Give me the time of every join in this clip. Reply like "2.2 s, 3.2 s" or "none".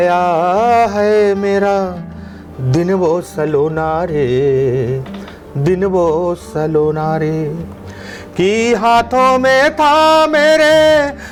none

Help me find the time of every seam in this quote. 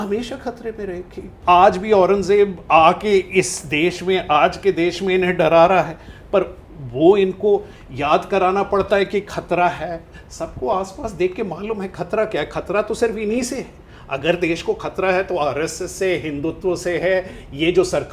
1.3 s

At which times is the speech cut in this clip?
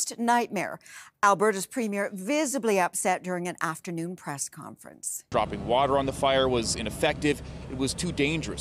5.2 s

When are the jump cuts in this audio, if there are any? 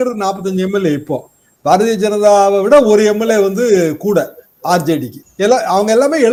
none

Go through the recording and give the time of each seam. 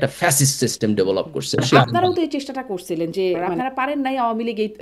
1.6 s, 3.5 s

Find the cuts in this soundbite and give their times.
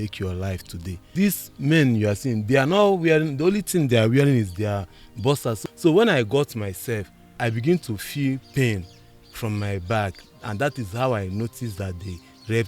1.1 s, 5.6 s, 7.4 s

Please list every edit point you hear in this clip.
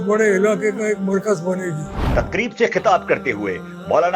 2.1 s

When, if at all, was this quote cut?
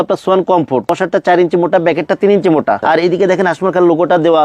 0.9 s, 2.8 s

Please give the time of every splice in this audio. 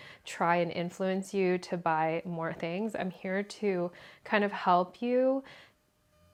none

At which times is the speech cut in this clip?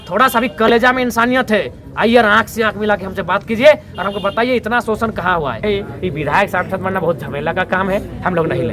5.6 s

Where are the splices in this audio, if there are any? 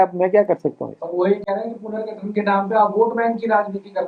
none

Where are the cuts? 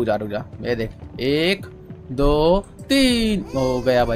none

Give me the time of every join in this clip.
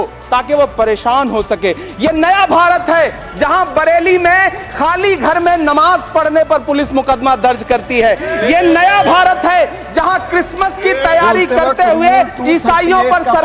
none

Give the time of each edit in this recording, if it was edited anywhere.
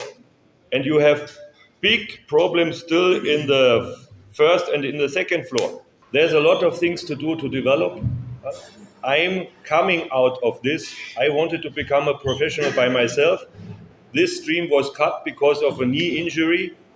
5.9 s

